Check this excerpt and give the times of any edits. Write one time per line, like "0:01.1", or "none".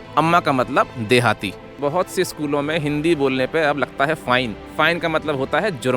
0:01.7
0:04.6

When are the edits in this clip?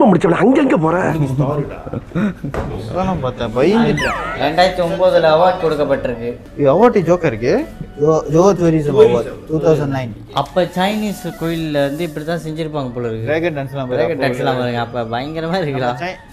none

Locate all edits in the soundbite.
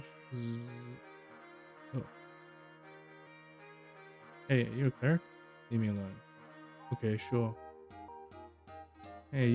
0:03.3
0:08.1

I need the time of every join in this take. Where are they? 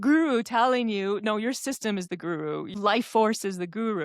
0:02.7

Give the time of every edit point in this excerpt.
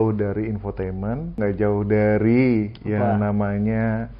0:01.4

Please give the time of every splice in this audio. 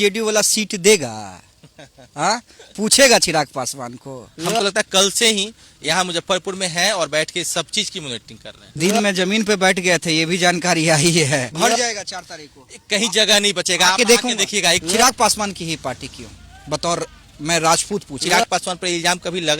0:04.3
0:11.5
0:14.8
0:18.2

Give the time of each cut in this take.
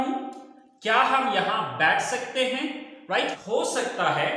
0:03.4

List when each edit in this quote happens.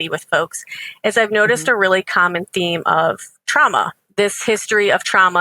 0:04.0

